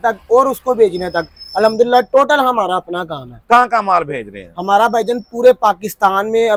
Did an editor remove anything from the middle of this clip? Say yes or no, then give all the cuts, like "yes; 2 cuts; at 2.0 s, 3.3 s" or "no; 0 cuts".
no; 0 cuts